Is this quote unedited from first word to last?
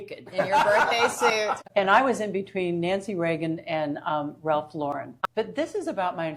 no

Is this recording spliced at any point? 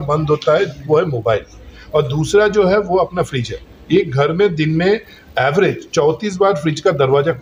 no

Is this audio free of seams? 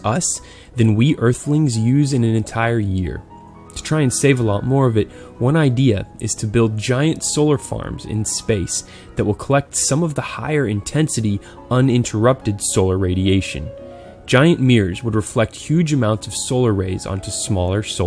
yes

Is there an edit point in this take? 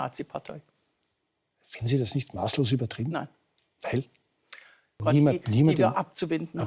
yes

